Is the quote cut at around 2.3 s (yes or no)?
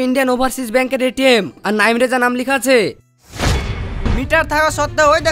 no